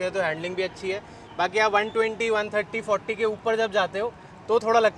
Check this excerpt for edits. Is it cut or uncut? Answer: uncut